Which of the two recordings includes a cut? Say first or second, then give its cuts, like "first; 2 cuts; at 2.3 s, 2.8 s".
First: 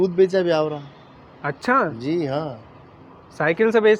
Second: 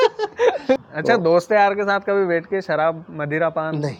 second; 1 cut; at 0.9 s